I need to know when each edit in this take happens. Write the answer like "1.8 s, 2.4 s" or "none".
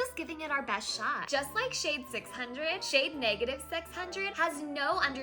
4.3 s